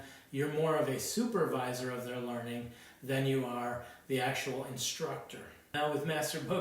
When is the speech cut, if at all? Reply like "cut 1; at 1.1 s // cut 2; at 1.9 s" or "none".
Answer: cut 1; at 5.7 s